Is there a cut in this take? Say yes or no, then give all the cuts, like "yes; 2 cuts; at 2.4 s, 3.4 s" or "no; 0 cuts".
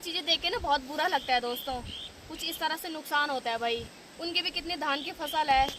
yes; 1 cut; at 4.0 s